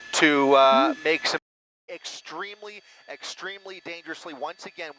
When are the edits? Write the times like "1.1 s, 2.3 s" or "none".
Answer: 1.4 s